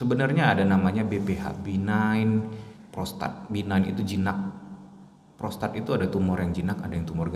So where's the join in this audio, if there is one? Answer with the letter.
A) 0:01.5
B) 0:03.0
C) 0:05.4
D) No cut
D